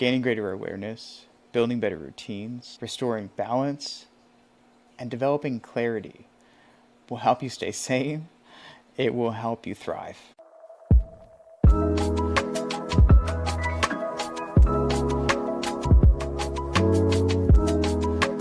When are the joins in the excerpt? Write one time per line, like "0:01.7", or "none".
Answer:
none